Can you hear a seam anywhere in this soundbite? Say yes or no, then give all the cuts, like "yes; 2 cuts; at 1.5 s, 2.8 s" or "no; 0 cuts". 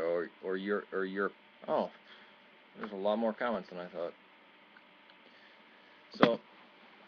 no; 0 cuts